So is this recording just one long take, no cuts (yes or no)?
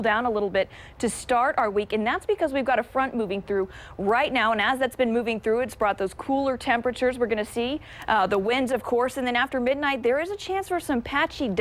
yes